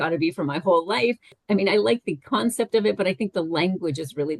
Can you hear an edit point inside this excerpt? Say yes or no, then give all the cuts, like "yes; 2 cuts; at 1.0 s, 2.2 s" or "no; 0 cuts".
yes; 1 cut; at 1.3 s